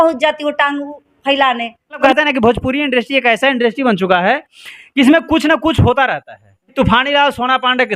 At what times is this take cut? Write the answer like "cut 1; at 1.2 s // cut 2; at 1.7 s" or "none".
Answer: cut 1; at 2.0 s // cut 2; at 6.7 s

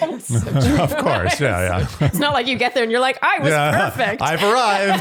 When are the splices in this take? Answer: none

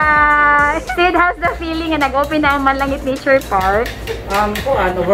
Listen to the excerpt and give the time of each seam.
cut 1; at 0.9 s

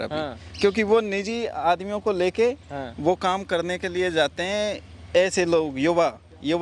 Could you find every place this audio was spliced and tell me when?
none

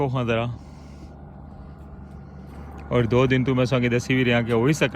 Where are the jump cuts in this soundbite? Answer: cut 1; at 2.7 s

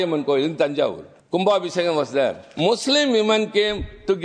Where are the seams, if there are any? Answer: cut 1; at 1.1 s // cut 2; at 2.4 s

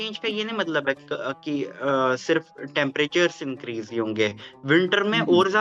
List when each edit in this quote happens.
none

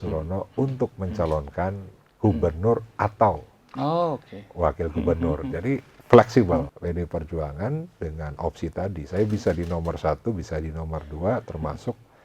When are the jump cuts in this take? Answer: cut 1; at 6.7 s

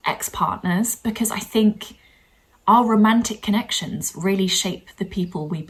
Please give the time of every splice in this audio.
none

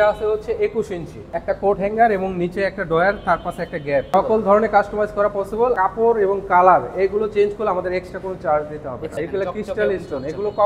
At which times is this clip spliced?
cut 1; at 1.2 s // cut 2; at 4.1 s // cut 3; at 5.8 s // cut 4; at 9.1 s

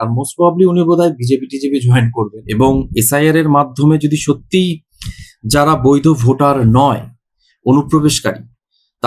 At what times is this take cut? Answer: cut 1; at 2.4 s

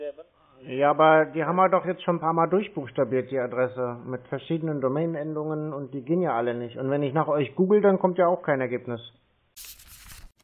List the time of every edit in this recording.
cut 1; at 9.5 s

